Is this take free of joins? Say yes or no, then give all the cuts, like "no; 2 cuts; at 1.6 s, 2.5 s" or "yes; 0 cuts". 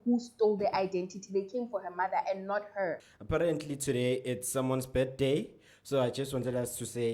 no; 1 cut; at 3.0 s